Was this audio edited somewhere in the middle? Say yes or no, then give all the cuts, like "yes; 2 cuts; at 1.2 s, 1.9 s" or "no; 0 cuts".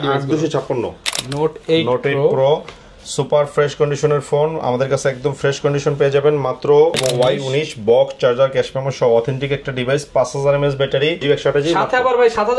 yes; 3 cuts; at 1.1 s, 7.0 s, 11.2 s